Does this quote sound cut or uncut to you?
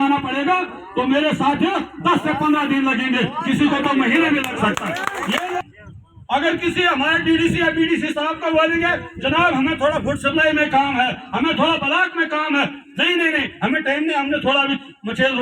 cut